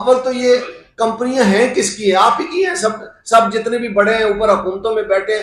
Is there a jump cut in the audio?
no; 0 cuts

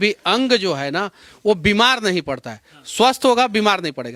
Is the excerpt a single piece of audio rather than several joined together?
yes; 0 cuts

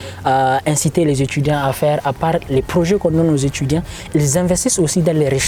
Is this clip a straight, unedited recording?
yes; 0 cuts

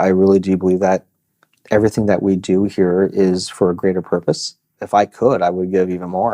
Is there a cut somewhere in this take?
yes; 1 cut; at 4.7 s

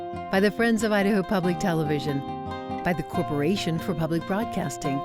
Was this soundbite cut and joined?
no; 0 cuts

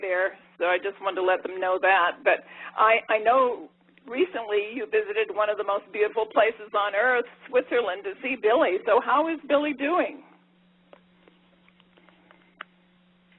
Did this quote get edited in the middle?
yes; 1 cut; at 4.7 s

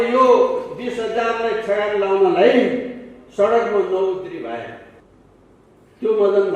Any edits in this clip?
yes; 1 cut; at 5.0 s

